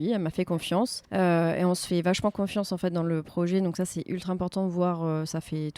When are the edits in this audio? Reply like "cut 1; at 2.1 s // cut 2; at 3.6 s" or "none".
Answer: cut 1; at 1.0 s